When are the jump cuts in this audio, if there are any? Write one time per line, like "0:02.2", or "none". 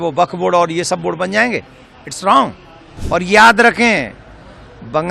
0:03.0

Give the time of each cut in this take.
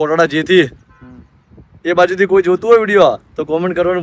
none

